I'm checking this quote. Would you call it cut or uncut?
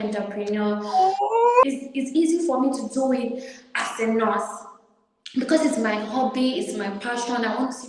cut